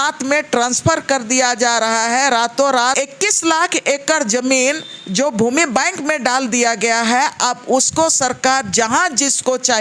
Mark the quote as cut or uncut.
cut